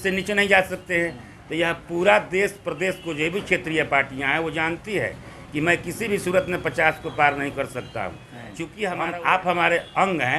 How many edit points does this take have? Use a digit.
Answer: 1